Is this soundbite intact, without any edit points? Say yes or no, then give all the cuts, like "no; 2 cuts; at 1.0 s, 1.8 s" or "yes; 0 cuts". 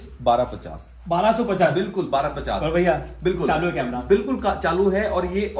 yes; 0 cuts